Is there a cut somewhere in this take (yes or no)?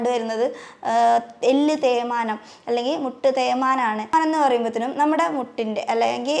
yes